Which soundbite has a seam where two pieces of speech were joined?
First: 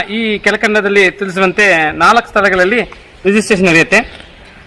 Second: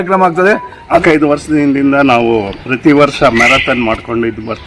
second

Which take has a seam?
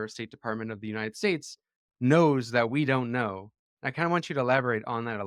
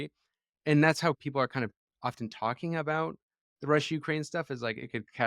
second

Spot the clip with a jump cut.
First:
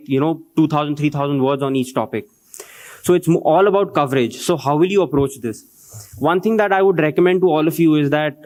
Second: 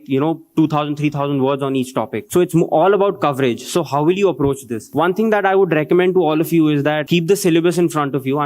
second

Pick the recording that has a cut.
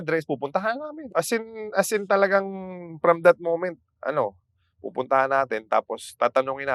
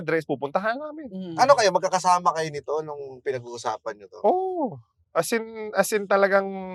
first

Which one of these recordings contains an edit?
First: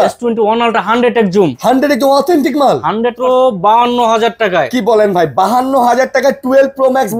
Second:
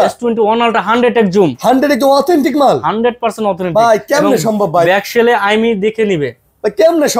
first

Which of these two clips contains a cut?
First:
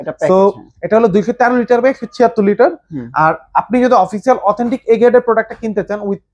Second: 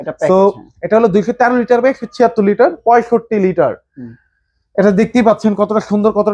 second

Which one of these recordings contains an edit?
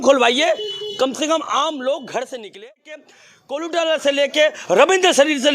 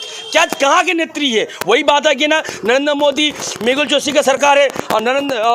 first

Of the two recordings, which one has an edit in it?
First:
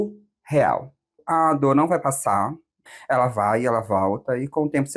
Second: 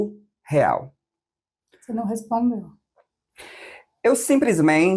first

